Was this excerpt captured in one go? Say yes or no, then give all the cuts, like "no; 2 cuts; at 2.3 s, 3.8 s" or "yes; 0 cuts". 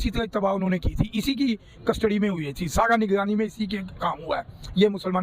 yes; 0 cuts